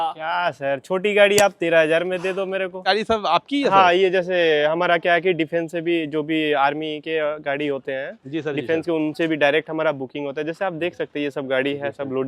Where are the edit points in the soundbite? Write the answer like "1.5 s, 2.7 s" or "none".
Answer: 2.8 s